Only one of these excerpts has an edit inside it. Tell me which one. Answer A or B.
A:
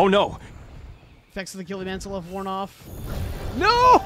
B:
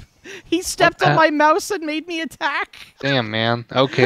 B